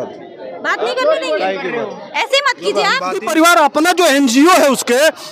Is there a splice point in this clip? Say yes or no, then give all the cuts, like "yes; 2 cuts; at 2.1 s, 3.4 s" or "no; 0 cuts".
yes; 1 cut; at 3.2 s